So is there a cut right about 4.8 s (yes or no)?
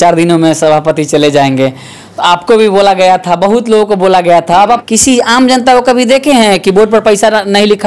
yes